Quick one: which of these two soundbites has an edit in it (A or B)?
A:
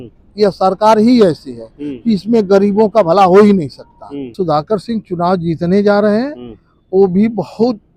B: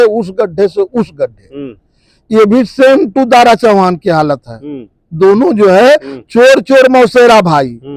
A